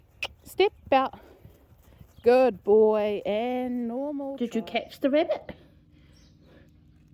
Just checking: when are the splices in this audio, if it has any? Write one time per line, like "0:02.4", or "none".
0:04.4